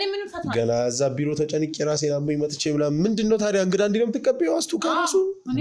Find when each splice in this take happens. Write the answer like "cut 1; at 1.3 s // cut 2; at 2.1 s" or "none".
none